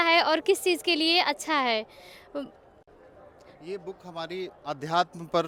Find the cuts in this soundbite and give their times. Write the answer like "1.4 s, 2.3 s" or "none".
none